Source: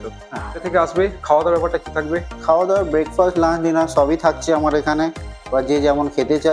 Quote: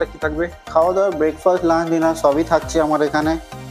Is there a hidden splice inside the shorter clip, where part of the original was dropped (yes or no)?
no